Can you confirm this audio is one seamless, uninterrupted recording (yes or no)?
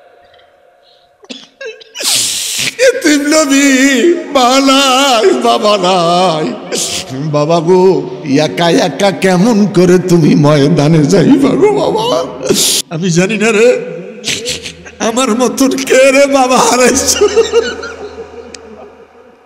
no